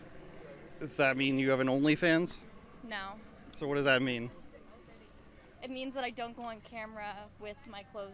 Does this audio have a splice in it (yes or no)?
no